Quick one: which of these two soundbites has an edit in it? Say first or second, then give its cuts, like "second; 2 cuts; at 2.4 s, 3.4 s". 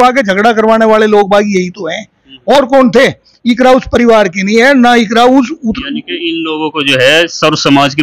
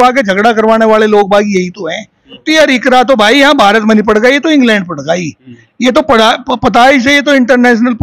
second; 1 cut; at 2.4 s